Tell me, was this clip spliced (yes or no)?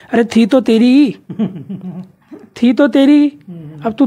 no